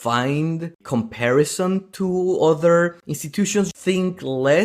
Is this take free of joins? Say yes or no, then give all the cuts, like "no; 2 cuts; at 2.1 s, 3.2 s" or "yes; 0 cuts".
no; 1 cut; at 3.7 s